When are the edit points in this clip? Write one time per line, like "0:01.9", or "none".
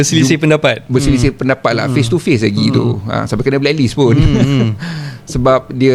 none